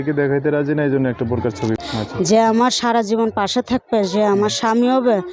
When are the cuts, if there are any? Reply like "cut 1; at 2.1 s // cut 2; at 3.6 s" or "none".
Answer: cut 1; at 1.8 s